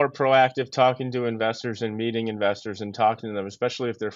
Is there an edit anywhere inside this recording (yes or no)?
no